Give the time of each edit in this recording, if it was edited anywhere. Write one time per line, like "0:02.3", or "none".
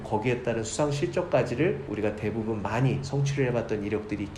none